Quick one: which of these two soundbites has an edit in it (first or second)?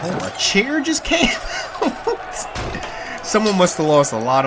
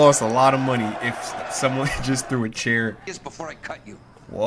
second